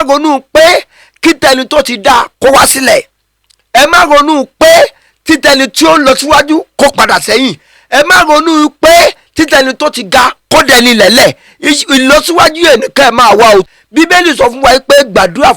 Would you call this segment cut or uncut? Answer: cut